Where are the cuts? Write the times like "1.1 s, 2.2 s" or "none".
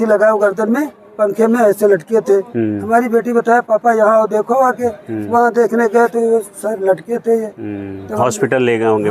none